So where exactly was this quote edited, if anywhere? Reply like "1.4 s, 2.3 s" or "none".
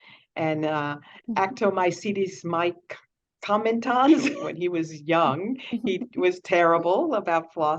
4.4 s